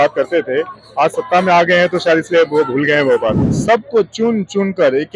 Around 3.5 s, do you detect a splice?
yes; 1 cut; at 3.5 s

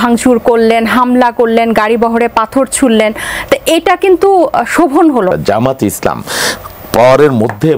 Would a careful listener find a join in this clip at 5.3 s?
yes; 1 cut; at 5.3 s

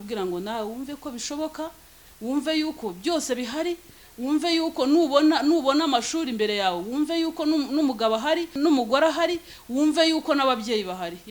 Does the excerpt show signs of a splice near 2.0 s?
no; 1 cut; at 8.5 s

